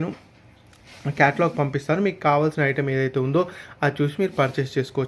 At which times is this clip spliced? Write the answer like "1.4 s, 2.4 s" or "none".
none